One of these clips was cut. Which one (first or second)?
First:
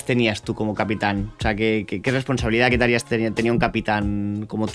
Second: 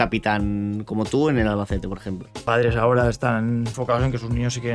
second